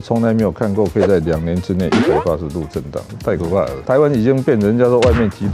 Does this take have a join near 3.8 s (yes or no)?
yes